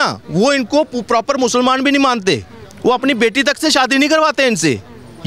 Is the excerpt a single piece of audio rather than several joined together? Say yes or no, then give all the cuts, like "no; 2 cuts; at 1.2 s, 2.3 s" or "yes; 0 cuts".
yes; 0 cuts